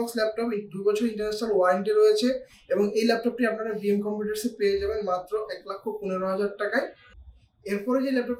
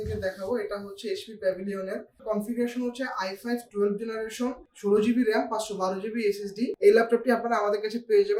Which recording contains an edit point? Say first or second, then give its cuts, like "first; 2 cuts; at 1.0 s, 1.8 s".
second; 3 cuts; at 2.2 s, 4.7 s, 6.7 s